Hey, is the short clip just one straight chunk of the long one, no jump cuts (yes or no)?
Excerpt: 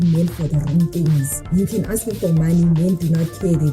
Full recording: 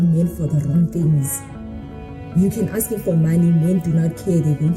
no